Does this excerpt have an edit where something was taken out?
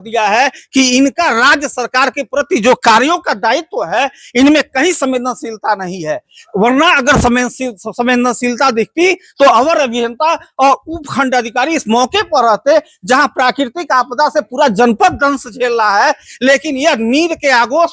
no; 0 cuts

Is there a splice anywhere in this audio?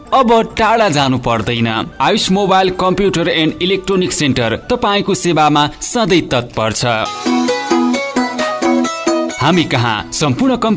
no; 0 cuts

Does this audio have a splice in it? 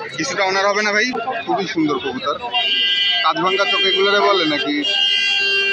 yes; 1 cut; at 1.2 s

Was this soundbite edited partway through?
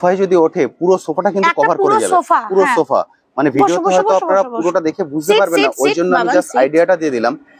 no; 0 cuts

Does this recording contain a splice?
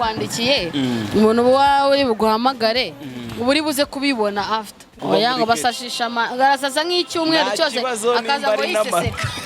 yes; 1 cut; at 5.0 s

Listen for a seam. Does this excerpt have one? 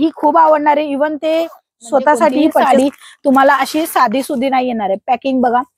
yes; 1 cut; at 2.6 s

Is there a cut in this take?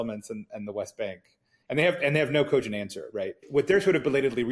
yes; 1 cut; at 3.4 s

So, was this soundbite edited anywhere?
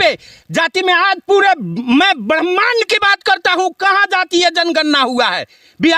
no; 0 cuts

